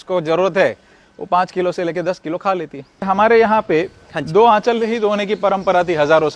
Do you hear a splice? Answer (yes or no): yes